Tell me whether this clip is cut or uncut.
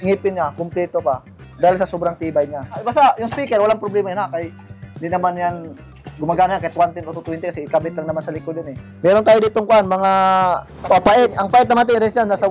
cut